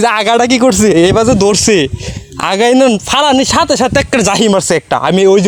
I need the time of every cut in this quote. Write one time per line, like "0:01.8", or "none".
none